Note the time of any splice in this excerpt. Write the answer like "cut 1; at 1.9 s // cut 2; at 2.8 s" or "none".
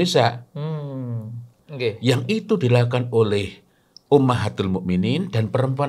cut 1; at 1.6 s